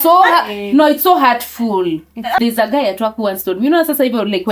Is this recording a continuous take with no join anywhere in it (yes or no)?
no